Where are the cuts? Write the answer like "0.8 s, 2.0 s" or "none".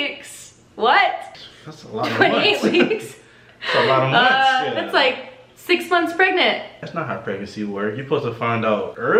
none